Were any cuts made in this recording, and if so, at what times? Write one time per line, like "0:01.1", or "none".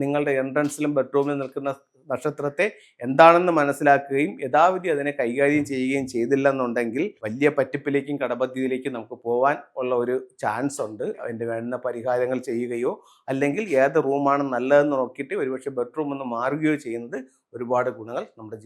0:07.2
0:11.2